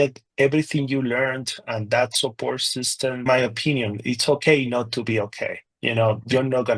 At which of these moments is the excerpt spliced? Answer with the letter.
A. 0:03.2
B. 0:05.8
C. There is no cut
A